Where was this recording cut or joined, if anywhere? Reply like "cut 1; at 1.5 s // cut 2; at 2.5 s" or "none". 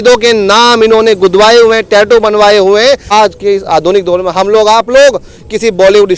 cut 1; at 3.1 s